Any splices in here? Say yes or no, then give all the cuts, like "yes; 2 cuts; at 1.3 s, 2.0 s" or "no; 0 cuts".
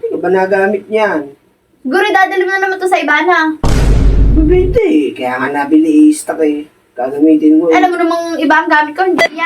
no; 0 cuts